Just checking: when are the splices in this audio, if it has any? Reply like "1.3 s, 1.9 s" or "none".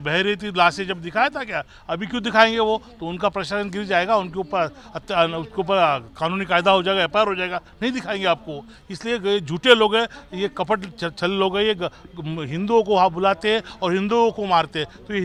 none